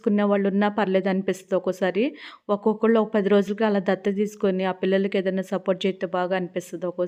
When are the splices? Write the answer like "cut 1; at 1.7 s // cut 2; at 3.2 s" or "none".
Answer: none